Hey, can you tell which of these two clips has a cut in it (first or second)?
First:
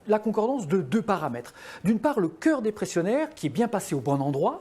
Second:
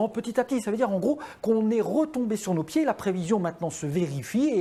first